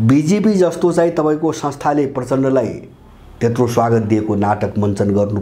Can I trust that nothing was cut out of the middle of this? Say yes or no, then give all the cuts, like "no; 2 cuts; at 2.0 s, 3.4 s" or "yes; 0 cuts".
yes; 0 cuts